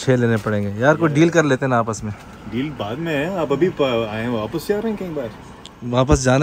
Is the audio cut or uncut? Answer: uncut